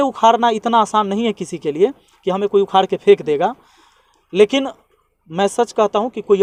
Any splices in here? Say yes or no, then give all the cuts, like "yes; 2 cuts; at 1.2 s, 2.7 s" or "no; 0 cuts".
no; 0 cuts